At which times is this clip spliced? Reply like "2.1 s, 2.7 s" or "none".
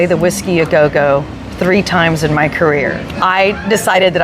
3.0 s